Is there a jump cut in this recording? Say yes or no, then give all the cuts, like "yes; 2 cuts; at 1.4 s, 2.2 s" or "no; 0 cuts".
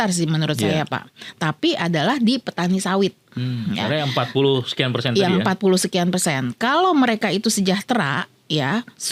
no; 0 cuts